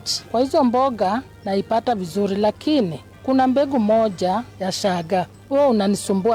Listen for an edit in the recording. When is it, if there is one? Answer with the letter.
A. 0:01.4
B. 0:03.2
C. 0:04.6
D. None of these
D